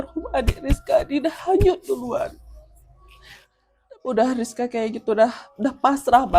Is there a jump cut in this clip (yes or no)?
yes